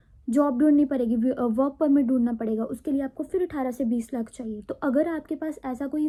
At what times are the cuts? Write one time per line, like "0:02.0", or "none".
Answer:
none